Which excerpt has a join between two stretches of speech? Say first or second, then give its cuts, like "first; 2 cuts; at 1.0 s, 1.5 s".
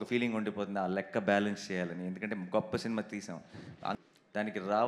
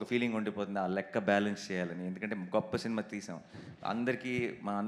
first; 1 cut; at 3.9 s